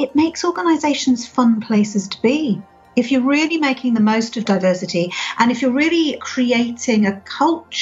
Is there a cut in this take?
yes; 2 cuts; at 4.4 s, 6.2 s

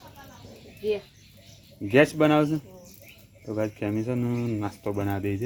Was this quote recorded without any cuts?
yes; 0 cuts

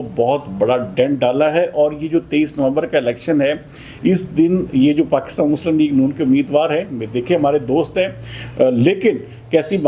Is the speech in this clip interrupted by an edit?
no; 0 cuts

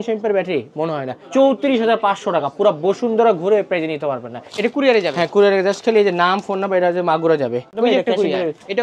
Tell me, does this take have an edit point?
yes; 3 cuts; at 1.1 s, 4.4 s, 7.7 s

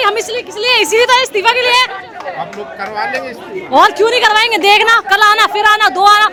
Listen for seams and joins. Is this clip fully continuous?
yes; 0 cuts

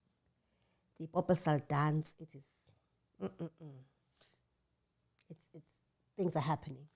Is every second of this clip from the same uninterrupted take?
yes; 0 cuts

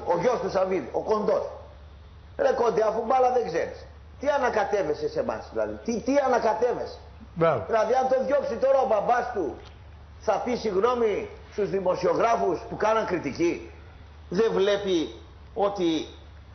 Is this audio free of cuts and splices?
yes; 0 cuts

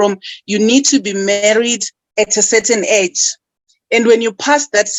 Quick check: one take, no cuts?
yes; 0 cuts

